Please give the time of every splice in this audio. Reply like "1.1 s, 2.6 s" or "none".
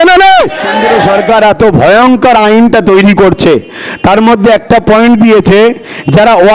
0.9 s